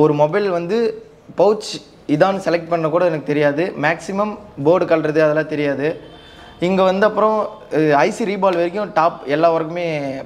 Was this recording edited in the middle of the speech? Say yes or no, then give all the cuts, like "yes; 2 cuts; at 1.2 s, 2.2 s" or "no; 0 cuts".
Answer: no; 0 cuts